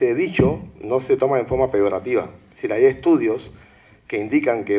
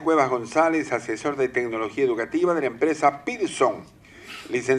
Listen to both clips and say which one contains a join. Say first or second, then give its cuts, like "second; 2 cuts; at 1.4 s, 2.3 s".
first; 1 cut; at 1.7 s